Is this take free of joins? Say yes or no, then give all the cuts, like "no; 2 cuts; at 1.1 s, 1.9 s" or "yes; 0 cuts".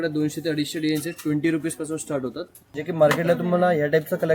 no; 1 cut; at 2.7 s